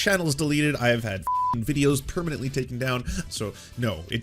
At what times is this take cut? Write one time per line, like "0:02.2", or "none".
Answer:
0:03.2